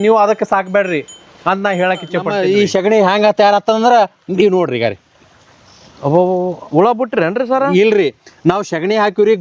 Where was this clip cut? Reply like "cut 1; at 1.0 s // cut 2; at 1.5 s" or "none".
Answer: cut 1; at 2.3 s